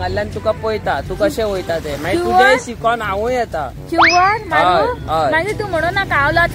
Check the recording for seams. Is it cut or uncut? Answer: uncut